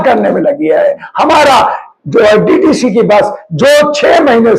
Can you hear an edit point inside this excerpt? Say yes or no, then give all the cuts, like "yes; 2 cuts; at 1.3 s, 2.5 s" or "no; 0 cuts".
no; 0 cuts